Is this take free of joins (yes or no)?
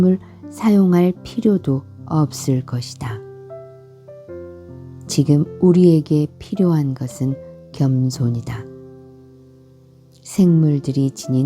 no